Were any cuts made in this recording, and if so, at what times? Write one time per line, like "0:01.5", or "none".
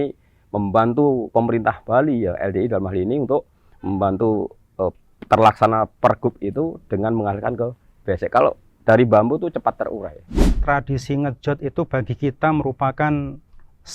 0:10.4